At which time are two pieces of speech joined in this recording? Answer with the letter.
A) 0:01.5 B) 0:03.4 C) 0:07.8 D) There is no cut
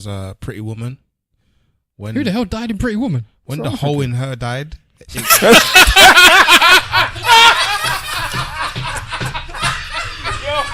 D